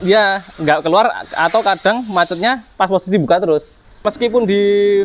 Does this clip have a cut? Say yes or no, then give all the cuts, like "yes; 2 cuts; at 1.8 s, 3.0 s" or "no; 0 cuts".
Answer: yes; 1 cut; at 4.1 s